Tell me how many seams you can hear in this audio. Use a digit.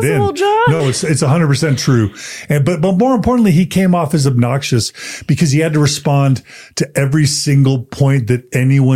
0